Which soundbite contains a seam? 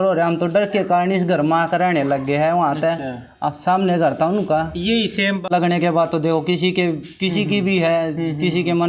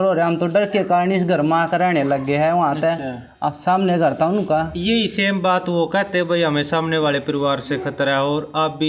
first; 1 cut; at 5.5 s

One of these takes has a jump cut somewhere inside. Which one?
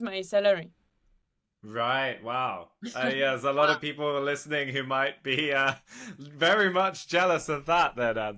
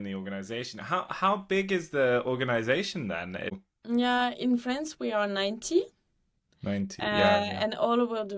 second; 1 cut; at 3.6 s

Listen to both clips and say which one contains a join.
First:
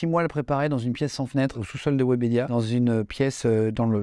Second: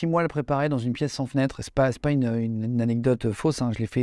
first; 1 cut; at 1.6 s

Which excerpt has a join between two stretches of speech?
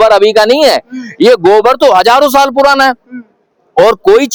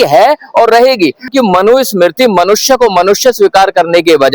second; 1 cut; at 1.3 s

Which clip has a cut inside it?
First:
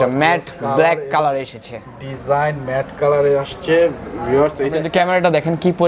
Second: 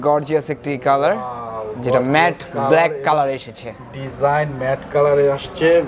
first; 1 cut; at 4.8 s

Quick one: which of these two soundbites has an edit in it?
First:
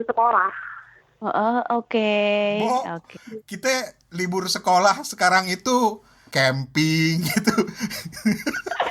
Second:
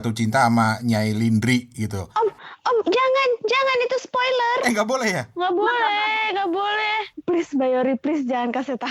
second; 2 cuts; at 2.1 s, 7.1 s

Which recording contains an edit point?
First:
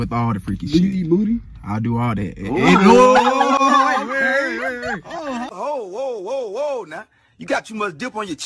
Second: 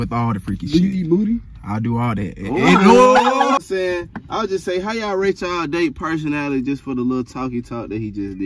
second; 1 cut; at 3.6 s

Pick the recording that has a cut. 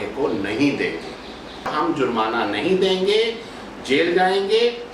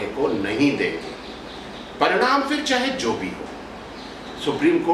first; 1 cut; at 1.7 s

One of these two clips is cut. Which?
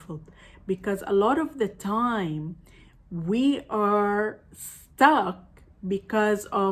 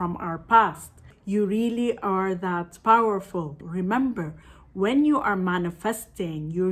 second; 2 cuts; at 1.1 s, 3.6 s

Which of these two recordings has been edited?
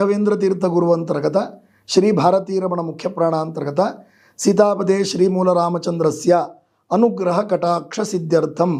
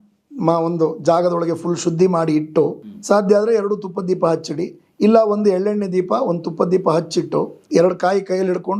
second; 2 cuts; at 2.9 s, 7.6 s

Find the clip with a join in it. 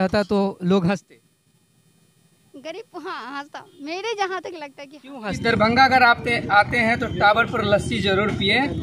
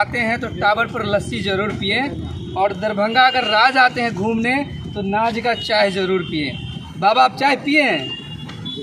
first; 1 cut; at 5.4 s

